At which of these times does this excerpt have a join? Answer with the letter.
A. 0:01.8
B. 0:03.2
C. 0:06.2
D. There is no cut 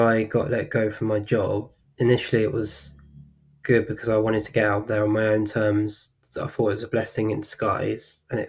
A